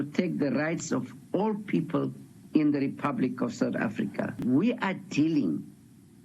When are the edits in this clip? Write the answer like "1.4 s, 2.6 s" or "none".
4.4 s